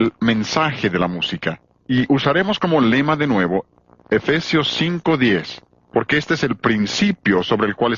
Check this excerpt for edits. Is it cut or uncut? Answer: cut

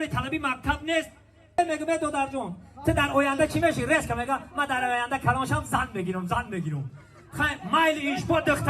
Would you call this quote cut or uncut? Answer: cut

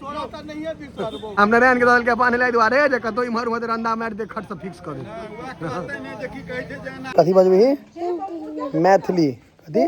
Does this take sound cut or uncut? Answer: cut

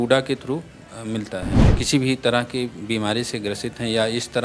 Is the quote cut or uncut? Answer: cut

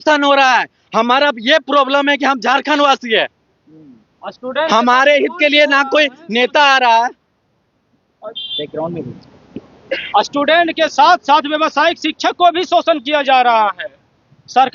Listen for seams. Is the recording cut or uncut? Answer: uncut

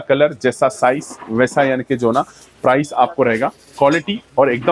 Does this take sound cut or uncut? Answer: uncut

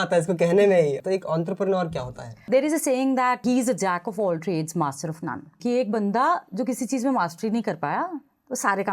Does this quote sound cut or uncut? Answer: cut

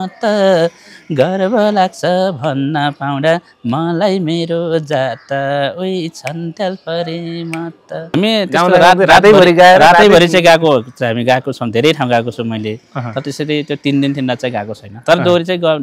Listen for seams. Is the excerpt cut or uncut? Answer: cut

